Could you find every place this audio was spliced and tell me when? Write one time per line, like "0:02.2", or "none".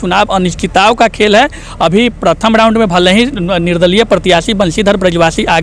none